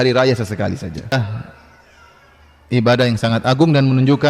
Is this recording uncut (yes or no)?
no